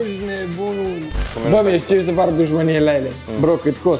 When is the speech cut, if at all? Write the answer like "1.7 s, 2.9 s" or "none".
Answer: 1.3 s